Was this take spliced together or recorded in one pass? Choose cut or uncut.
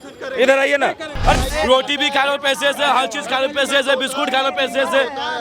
cut